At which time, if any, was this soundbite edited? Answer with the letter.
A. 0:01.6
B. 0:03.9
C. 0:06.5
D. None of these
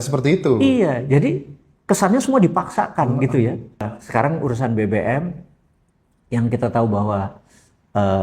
B